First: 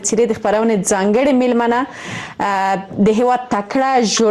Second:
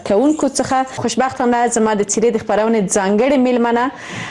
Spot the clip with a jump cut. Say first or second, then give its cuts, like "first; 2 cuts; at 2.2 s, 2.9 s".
second; 1 cut; at 1.0 s